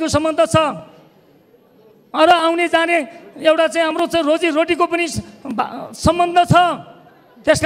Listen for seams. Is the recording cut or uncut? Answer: uncut